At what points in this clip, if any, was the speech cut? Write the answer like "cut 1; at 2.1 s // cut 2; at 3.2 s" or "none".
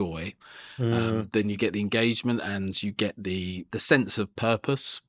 cut 1; at 3.6 s

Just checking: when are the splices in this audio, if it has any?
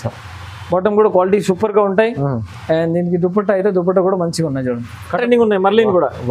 cut 1; at 5.2 s

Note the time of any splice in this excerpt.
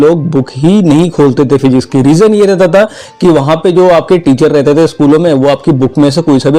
none

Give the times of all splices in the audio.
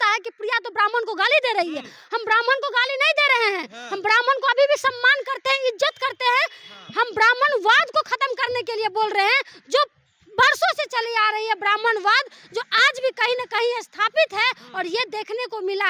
none

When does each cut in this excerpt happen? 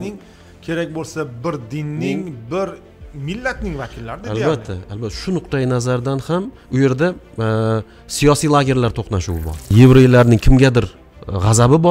cut 1; at 9.7 s

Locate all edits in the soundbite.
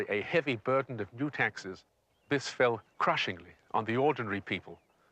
cut 1; at 2.5 s

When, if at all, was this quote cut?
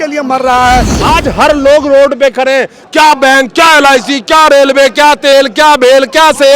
cut 1; at 1.0 s

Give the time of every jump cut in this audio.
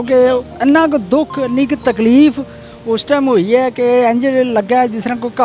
none

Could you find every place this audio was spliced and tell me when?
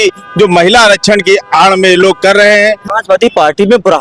cut 1; at 2.9 s

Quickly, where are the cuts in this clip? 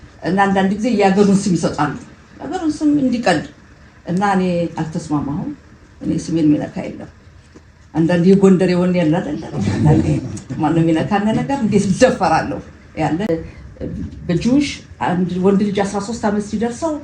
cut 1; at 13.3 s

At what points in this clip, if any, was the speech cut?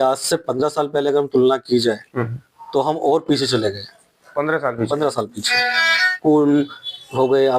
cut 1; at 6.0 s

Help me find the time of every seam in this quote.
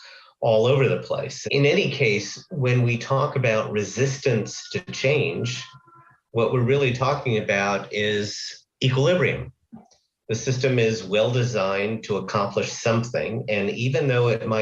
cut 1; at 1.4 s // cut 2; at 4.8 s

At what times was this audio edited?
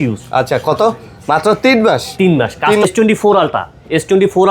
cut 1; at 2.8 s

